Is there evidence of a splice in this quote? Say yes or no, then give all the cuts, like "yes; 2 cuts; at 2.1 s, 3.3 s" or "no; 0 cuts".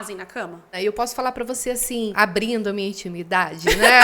yes; 2 cuts; at 0.7 s, 2.1 s